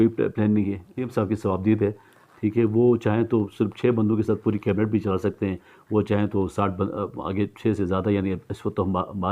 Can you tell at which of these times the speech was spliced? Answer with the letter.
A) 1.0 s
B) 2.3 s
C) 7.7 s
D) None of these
A